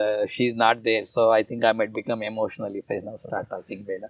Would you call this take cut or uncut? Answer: uncut